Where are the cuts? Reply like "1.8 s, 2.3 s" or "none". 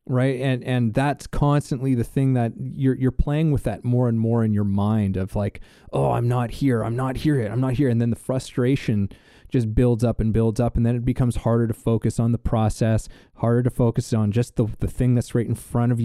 none